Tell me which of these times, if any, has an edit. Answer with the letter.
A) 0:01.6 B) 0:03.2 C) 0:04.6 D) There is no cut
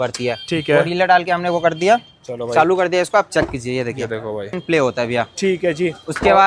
C